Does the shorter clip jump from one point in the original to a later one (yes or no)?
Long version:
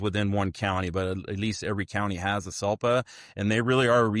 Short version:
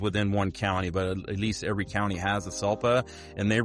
no